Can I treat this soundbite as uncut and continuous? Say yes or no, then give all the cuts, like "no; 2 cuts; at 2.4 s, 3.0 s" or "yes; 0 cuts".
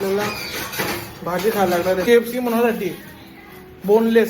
no; 1 cut; at 2.0 s